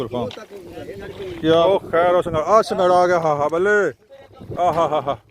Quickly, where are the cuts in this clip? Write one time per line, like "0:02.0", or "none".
0:01.7